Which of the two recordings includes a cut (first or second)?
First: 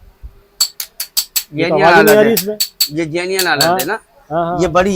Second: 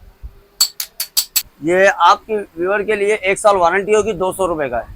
second